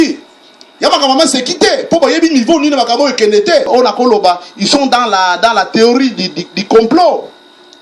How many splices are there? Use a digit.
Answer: 1